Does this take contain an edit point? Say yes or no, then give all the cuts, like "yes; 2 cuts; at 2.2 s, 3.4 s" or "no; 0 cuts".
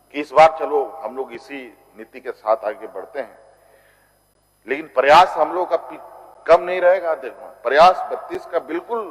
no; 0 cuts